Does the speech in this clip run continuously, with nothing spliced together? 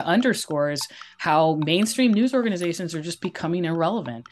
yes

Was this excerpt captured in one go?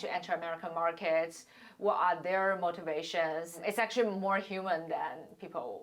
no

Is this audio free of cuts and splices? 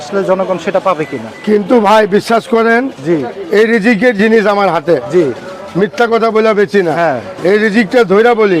yes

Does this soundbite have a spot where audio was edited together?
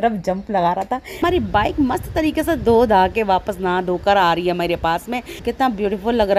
yes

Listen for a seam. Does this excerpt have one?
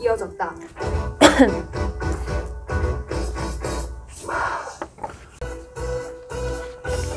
yes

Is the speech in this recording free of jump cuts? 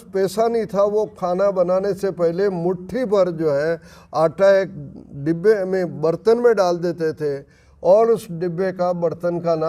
yes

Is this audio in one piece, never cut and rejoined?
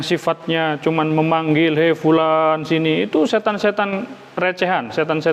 yes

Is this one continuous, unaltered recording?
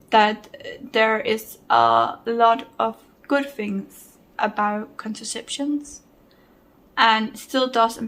yes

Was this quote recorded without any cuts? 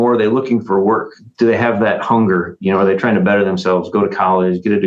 no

